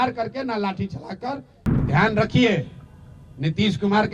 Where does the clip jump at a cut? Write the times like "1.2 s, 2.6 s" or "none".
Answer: 1.6 s